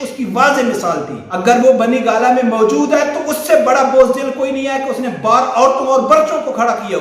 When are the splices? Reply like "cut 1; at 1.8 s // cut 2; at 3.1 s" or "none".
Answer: cut 1; at 1.2 s